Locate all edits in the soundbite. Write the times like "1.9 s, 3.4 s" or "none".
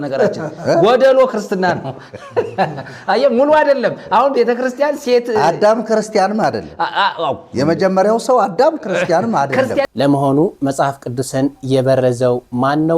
9.9 s